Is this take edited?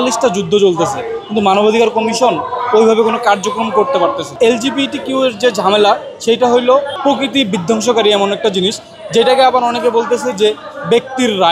yes; 2 cuts; at 4.3 s, 6.9 s

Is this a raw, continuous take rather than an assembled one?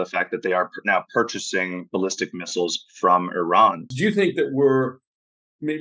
no; 1 cut; at 3.9 s

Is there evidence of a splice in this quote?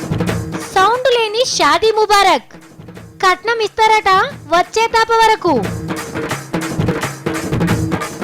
yes; 1 cut; at 6.9 s

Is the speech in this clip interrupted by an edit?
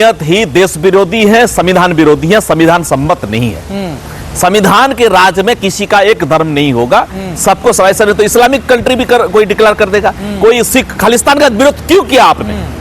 no; 0 cuts

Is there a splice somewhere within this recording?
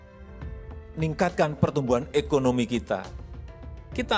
yes; 1 cut; at 0.9 s

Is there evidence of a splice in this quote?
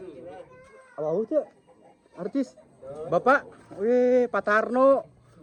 no; 0 cuts

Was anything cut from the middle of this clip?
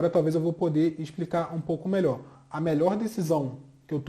yes; 1 cut; at 2.4 s

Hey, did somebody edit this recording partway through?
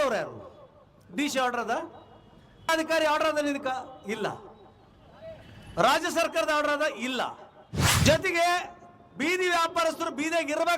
yes; 2 cuts; at 2.7 s, 8.0 s

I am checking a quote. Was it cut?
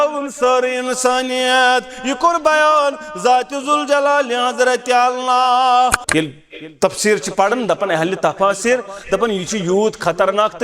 yes; 1 cut; at 6.0 s

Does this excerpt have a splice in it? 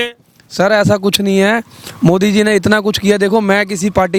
no; 0 cuts

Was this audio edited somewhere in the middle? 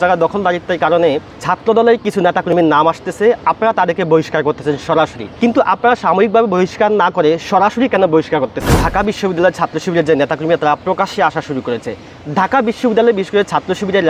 yes; 2 cuts; at 5.2 s, 8.8 s

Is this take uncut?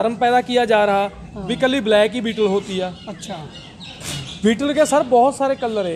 yes; 0 cuts

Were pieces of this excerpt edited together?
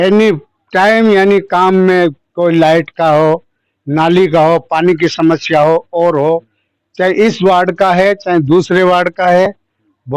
no; 0 cuts

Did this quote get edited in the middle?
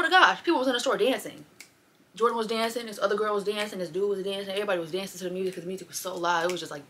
no; 0 cuts

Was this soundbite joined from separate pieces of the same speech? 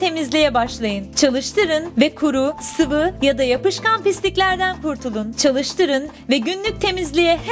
yes; 1 cut; at 1.0 s

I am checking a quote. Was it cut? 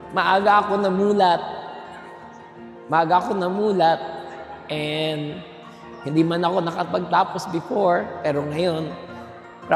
no; 0 cuts

